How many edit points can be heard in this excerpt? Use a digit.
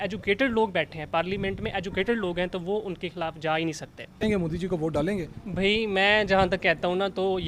1